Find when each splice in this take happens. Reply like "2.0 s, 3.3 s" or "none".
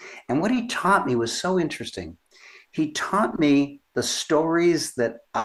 none